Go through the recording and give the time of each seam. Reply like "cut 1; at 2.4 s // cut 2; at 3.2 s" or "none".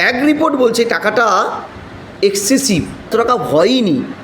cut 1; at 3.1 s

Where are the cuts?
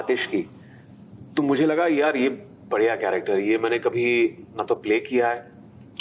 none

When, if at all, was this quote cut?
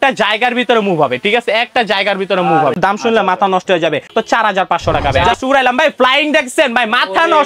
cut 1; at 2.8 s // cut 2; at 4.1 s // cut 3; at 5.3 s

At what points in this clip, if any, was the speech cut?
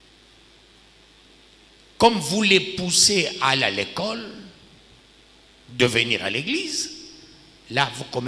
none

